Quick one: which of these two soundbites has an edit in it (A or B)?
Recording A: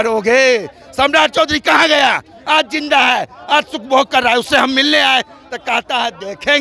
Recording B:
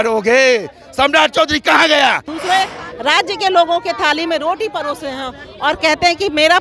B